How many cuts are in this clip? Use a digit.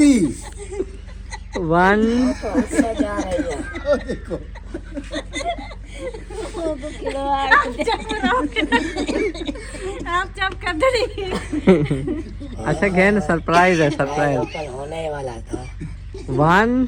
0